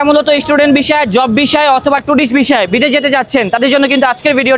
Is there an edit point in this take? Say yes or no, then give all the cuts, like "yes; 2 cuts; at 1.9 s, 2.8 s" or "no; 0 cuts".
no; 0 cuts